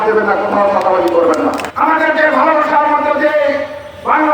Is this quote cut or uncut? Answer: cut